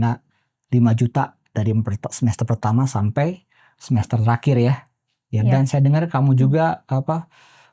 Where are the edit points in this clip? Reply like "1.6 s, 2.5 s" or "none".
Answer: none